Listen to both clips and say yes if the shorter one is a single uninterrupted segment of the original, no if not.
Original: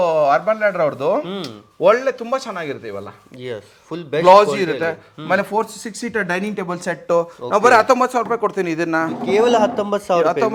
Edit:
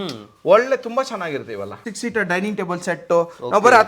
no